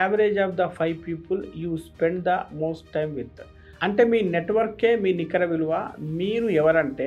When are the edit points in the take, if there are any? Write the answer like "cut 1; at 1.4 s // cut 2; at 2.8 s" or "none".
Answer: none